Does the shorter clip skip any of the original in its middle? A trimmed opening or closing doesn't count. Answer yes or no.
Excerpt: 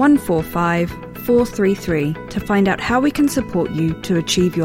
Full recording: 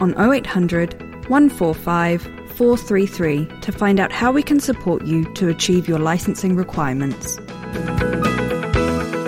no